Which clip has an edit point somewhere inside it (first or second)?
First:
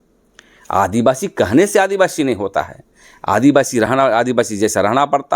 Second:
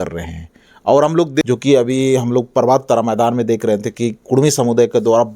second